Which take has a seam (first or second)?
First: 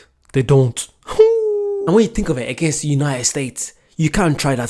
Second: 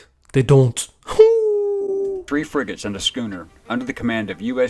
first